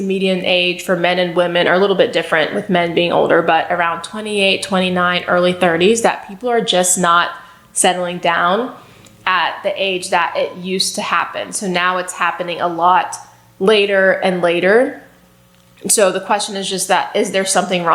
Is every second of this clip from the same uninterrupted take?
yes; 0 cuts

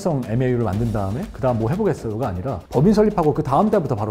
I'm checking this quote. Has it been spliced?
yes; 1 cut; at 2.6 s

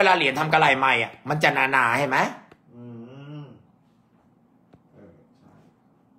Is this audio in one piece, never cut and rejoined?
yes; 0 cuts

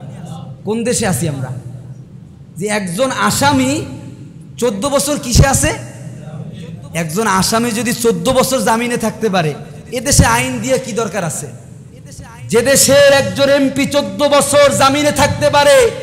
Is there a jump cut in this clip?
no; 0 cuts

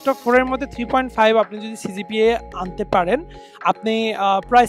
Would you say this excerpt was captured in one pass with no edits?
yes; 0 cuts

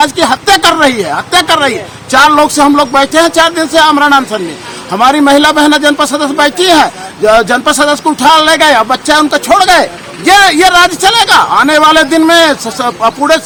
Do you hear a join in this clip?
no; 0 cuts

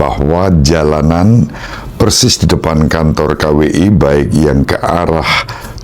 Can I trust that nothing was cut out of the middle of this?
yes; 0 cuts

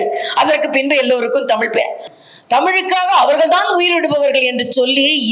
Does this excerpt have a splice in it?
yes; 1 cut; at 2.0 s

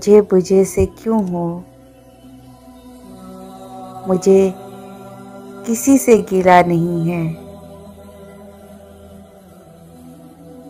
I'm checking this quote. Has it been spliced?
yes; 4 cuts; at 1.6 s, 3.8 s, 7.4 s, 9.0 s

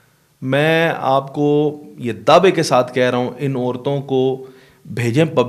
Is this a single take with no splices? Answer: yes; 0 cuts

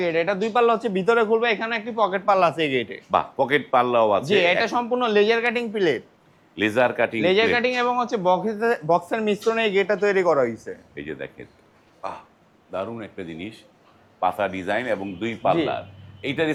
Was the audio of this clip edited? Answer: no; 0 cuts

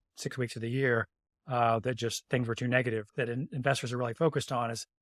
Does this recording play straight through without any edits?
no; 1 cut; at 3.1 s

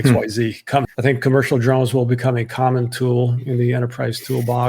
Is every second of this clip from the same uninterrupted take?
no; 1 cut; at 0.9 s

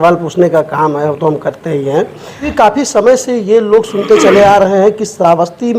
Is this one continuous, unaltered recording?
no; 1 cut; at 2.5 s

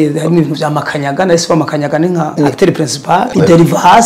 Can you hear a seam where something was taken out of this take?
yes; 2 cuts; at 2.3 s, 3.3 s

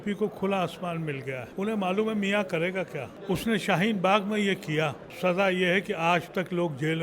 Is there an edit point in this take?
yes; 3 cuts; at 1.5 s, 3.1 s, 5.1 s

